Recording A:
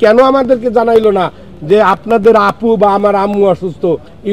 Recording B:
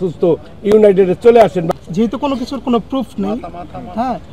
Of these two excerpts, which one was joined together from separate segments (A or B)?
B